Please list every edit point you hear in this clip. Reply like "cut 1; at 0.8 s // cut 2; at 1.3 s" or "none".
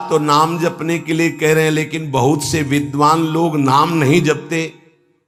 none